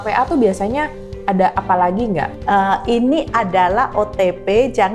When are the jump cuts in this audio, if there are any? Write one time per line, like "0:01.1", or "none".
0:02.3